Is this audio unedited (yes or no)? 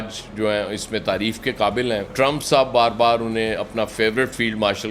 no